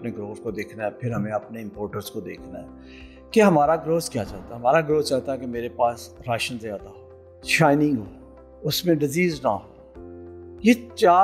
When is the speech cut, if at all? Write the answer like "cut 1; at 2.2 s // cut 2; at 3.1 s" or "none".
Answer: none